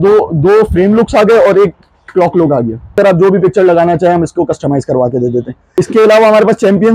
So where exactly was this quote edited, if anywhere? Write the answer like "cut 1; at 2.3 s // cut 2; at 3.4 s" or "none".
cut 1; at 3.0 s // cut 2; at 5.6 s